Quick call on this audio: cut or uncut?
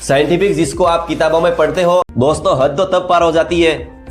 cut